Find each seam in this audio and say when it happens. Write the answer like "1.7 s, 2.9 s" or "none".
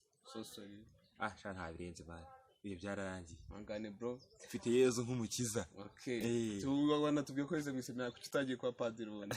none